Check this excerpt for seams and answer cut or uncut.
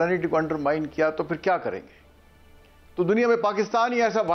uncut